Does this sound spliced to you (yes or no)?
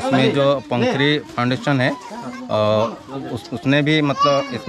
no